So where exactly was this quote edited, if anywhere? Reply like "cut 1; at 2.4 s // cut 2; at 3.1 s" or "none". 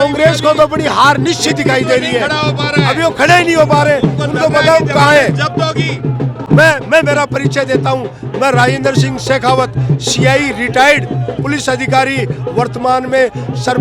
none

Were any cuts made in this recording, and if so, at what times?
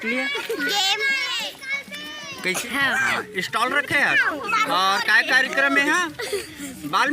cut 1; at 2.6 s

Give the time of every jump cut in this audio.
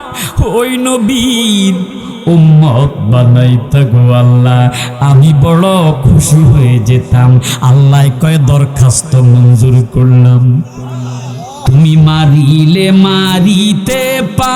cut 1; at 11.6 s

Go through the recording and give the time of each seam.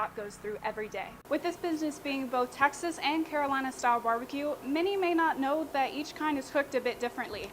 cut 1; at 1.1 s

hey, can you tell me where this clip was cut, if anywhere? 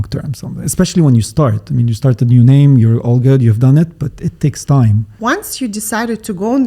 cut 1; at 5.1 s

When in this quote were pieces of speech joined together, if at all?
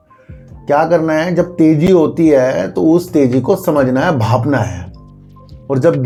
none

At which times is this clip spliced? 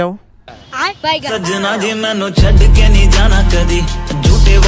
cut 1; at 1.3 s

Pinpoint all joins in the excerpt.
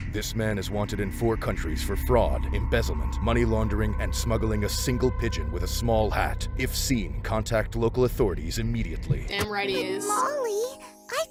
none

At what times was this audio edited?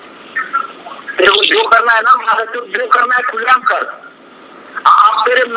none

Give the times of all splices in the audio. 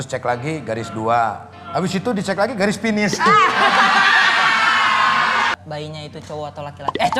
cut 1; at 5.5 s

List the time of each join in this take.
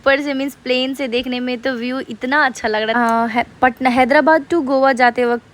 cut 1; at 3.0 s

